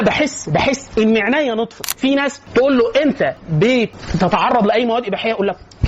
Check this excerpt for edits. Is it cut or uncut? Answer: cut